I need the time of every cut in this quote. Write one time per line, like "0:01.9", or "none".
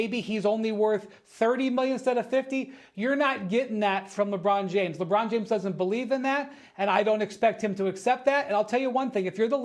none